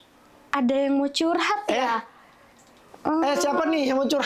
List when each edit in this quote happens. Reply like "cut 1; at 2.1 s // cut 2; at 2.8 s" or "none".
none